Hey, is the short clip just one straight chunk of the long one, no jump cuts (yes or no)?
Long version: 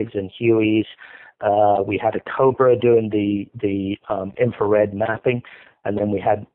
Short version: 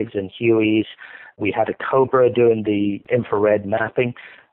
no